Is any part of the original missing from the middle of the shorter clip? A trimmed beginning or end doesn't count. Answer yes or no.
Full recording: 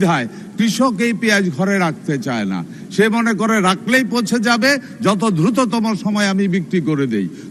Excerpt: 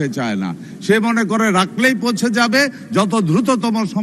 no